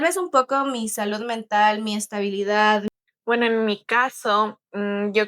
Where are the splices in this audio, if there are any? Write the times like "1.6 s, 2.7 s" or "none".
2.8 s